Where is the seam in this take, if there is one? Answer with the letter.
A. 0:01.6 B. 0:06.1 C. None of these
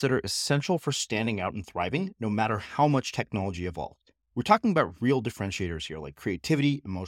C